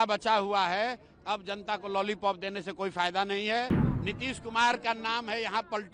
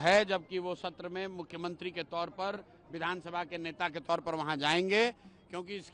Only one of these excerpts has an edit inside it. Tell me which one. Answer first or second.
first